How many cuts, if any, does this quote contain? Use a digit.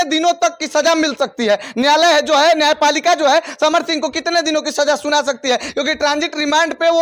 0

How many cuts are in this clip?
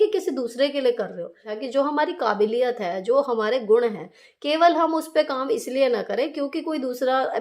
1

